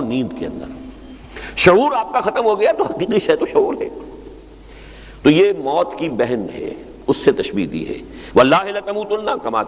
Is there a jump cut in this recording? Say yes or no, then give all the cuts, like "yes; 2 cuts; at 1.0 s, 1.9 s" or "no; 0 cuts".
no; 0 cuts